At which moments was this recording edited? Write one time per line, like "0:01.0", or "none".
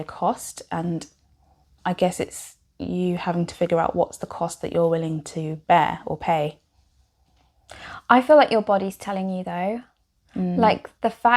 none